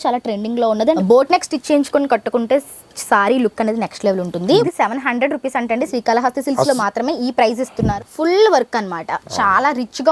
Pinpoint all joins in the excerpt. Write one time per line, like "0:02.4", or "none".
0:01.0
0:04.6
0:07.9